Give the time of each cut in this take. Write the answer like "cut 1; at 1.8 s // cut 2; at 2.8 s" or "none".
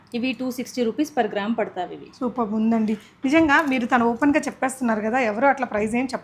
none

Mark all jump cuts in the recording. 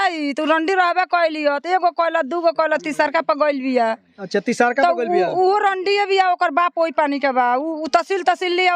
none

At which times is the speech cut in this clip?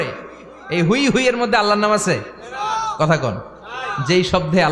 none

